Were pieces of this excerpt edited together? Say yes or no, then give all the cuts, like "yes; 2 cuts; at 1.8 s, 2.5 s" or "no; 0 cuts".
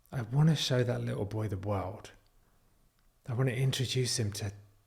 no; 0 cuts